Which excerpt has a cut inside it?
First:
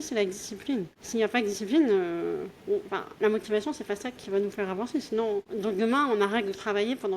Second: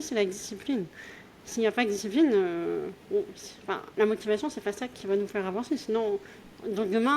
first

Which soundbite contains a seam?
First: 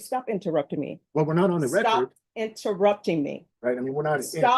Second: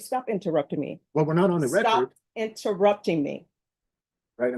first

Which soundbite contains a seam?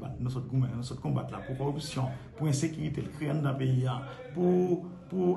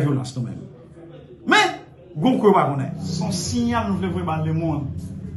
second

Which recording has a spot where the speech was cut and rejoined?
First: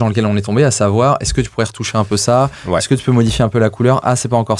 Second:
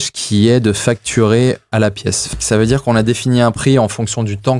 second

